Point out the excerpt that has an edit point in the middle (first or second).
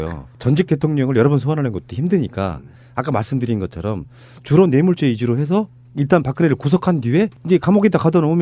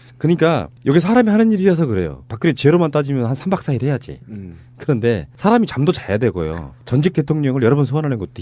second